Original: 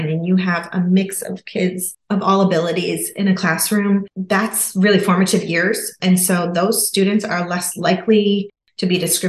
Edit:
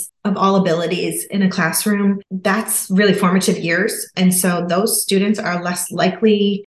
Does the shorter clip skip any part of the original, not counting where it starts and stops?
no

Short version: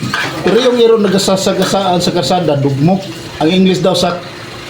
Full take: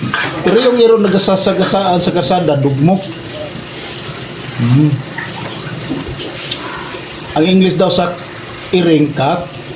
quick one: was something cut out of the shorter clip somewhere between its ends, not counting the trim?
yes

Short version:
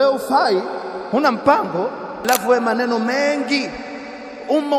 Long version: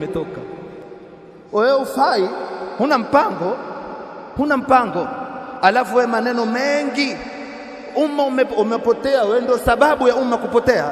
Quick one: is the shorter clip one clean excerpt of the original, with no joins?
no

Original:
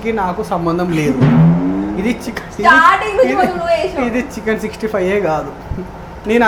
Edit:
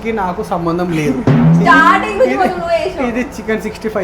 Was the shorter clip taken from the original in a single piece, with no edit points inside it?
no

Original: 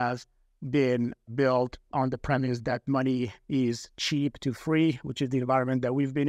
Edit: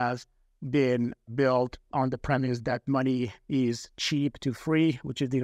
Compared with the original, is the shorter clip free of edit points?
yes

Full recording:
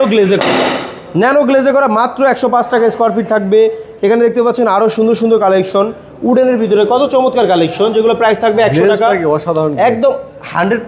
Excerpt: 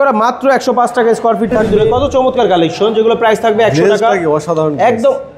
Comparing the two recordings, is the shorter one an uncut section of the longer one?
no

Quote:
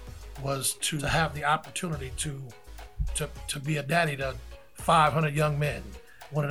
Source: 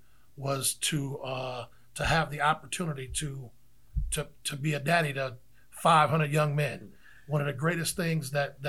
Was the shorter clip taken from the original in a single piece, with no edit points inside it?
no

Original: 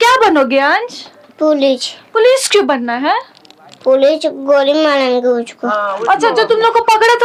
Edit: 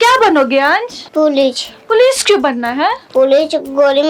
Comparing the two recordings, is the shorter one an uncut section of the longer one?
no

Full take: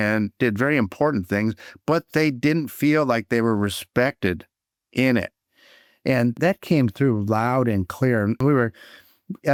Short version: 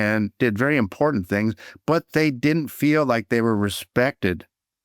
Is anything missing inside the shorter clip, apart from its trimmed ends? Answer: no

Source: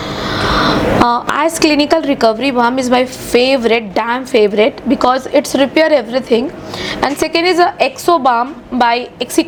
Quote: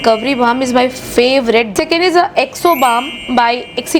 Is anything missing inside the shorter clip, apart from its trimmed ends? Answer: yes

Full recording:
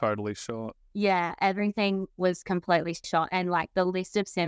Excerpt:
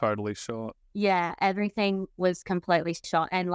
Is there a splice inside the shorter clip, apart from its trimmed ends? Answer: no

